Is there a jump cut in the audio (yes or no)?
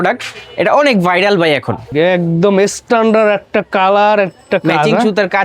yes